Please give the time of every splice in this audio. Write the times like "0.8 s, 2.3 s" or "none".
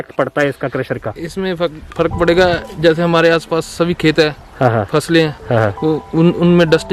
none